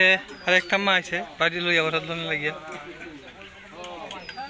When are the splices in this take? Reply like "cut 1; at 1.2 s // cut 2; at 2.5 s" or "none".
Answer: none

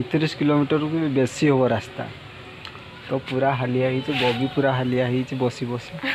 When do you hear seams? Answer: none

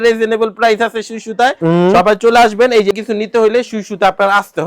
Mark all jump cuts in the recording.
cut 1; at 2.9 s

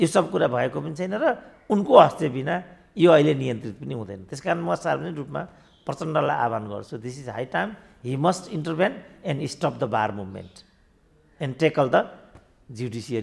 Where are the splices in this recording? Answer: none

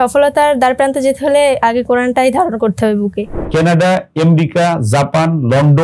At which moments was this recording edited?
cut 1; at 3.4 s

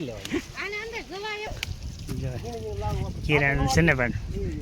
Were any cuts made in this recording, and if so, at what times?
cut 1; at 1.5 s

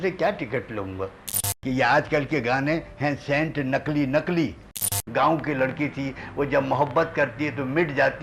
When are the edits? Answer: cut 1; at 1.5 s // cut 2; at 4.8 s

